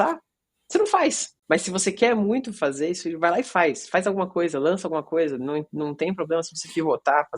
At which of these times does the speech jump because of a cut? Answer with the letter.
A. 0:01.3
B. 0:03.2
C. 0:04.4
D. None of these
A